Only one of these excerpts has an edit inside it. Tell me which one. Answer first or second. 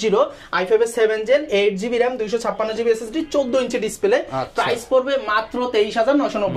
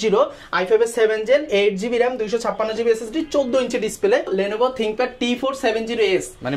second